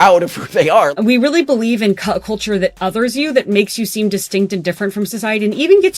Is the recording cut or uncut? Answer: cut